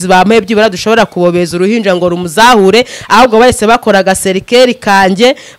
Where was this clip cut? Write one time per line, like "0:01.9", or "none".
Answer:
none